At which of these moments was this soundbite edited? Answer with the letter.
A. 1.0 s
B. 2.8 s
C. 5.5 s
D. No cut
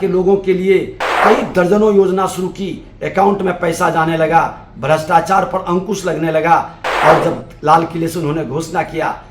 A